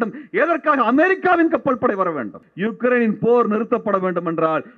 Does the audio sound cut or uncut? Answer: cut